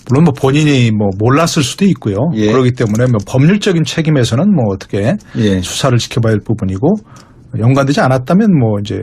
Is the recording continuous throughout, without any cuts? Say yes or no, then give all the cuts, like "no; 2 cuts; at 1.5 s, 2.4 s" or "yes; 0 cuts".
no; 1 cut; at 4.7 s